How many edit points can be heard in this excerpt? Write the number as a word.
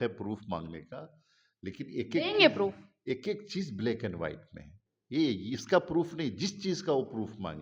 zero